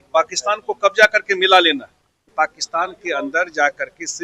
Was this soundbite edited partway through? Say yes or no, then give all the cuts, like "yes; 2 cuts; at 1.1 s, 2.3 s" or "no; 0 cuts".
yes; 1 cut; at 2.3 s